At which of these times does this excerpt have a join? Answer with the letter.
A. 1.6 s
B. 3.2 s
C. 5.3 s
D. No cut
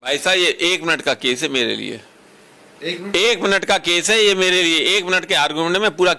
D